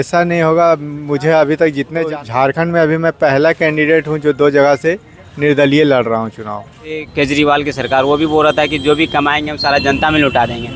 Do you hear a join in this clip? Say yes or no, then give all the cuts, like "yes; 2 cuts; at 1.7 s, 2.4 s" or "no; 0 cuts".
yes; 2 cuts; at 2.1 s, 7.1 s